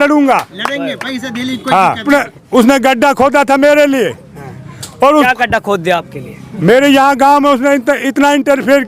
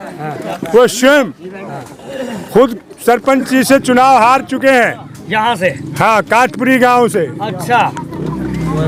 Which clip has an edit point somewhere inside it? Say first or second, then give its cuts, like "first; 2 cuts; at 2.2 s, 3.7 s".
first; 1 cut; at 2.0 s